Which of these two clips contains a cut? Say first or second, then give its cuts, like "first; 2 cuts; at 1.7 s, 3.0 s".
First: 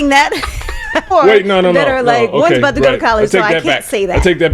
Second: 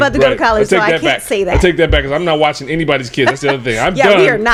first; 1 cut; at 1.1 s